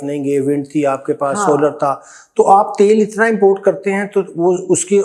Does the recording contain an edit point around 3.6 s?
no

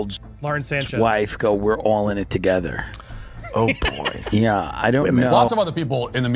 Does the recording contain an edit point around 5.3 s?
yes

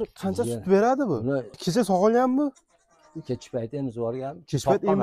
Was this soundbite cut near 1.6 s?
yes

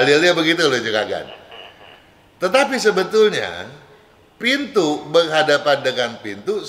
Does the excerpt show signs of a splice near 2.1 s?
no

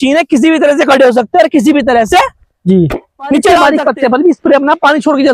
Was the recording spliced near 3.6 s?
yes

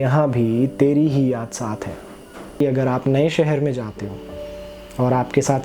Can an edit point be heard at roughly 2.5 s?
yes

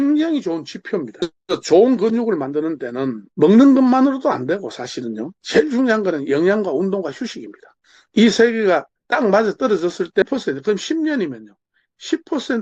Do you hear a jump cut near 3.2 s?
no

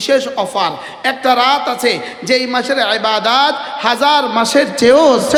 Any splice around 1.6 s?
no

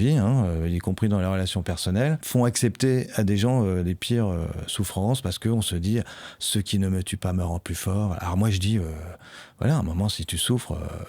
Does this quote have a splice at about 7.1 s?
no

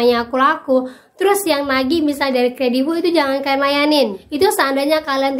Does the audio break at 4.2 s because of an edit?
yes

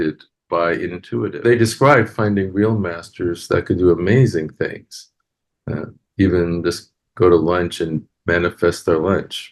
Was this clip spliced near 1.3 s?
yes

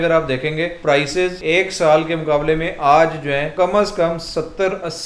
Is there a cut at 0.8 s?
yes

